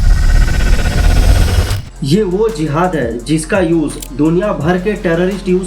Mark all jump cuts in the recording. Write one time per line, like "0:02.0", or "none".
0:01.9